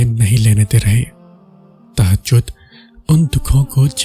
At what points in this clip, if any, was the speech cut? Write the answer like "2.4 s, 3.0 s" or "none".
none